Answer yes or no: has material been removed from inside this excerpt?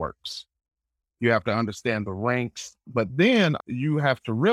yes